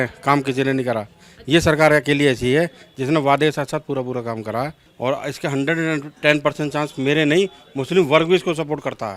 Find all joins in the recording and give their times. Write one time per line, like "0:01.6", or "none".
0:04.8